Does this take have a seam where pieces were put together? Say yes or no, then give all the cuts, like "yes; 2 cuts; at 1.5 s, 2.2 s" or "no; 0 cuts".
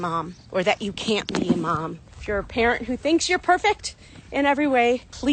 yes; 1 cut; at 2.0 s